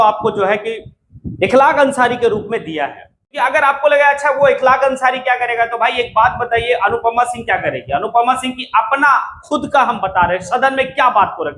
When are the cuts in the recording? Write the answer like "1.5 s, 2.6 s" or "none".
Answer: 3.2 s